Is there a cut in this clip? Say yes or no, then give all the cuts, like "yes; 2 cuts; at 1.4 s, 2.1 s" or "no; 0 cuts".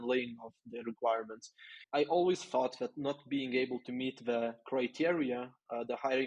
yes; 1 cut; at 1.8 s